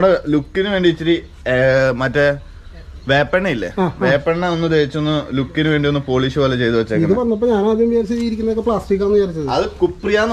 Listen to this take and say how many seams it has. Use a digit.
0